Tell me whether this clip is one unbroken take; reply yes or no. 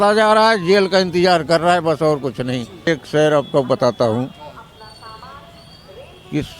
no